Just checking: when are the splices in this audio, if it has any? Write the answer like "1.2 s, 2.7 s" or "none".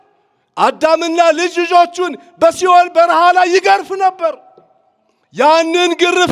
none